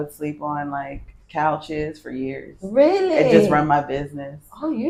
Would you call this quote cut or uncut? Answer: uncut